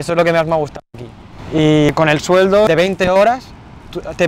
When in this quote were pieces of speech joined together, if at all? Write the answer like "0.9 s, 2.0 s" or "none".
2.7 s